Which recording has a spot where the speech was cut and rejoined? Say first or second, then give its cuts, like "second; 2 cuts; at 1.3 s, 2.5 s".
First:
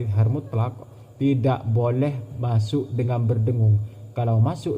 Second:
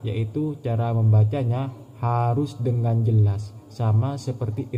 first; 1 cut; at 2.3 s